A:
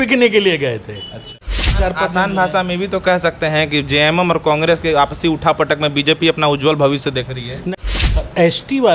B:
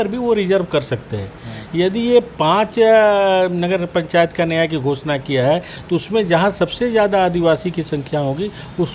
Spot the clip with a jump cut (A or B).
A